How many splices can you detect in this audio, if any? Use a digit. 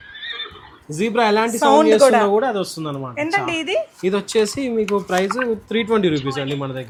0